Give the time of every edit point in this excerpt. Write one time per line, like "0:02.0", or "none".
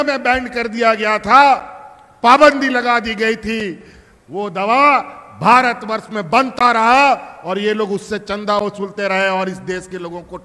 none